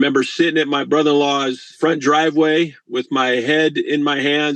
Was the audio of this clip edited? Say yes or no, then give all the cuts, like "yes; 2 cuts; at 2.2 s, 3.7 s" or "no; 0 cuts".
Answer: yes; 1 cut; at 1.7 s